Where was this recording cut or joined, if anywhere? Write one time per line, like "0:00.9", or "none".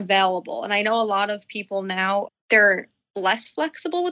none